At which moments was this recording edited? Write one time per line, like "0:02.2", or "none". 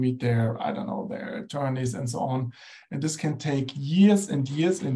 none